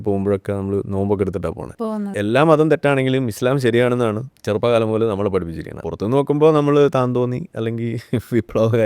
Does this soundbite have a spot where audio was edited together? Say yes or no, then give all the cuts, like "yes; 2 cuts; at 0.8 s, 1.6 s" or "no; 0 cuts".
yes; 3 cuts; at 2.1 s, 4.3 s, 5.8 s